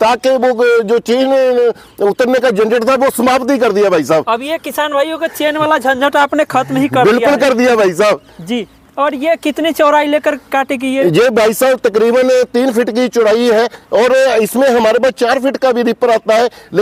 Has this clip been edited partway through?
no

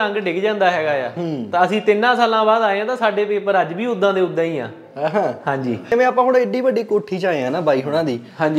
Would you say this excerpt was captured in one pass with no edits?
no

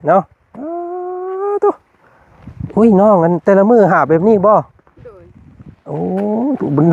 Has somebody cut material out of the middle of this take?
no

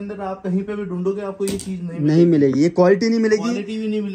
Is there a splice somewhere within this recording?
no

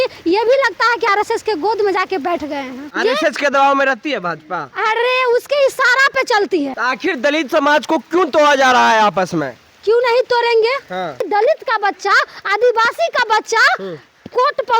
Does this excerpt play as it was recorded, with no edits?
no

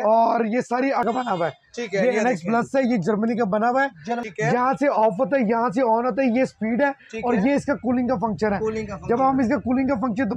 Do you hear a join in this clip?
yes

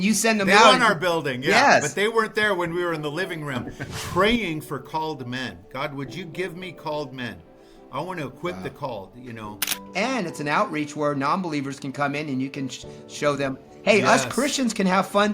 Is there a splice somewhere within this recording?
yes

